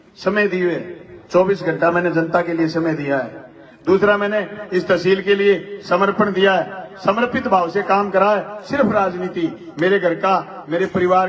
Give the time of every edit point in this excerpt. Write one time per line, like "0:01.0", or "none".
none